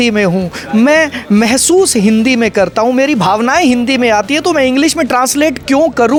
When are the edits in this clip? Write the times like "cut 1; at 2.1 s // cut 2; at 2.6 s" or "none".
none